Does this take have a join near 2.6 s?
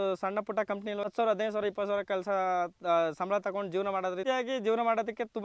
no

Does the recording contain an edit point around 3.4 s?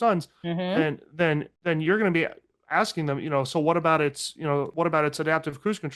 no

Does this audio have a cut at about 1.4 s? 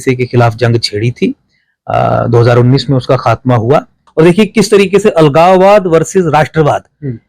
no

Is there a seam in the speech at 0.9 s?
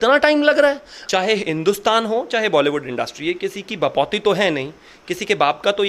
yes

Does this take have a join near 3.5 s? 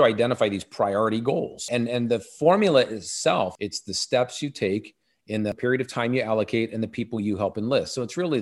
yes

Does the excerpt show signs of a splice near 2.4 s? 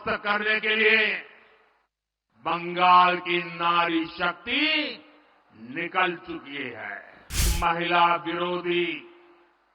no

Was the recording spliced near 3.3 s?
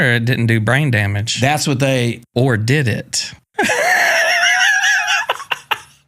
yes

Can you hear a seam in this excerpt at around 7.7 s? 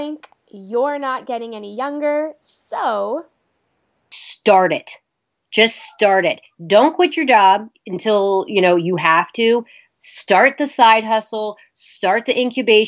yes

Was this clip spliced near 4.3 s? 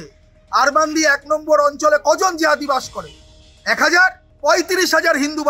yes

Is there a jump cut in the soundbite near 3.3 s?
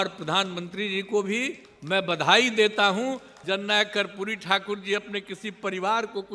yes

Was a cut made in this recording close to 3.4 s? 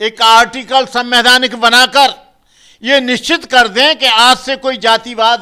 no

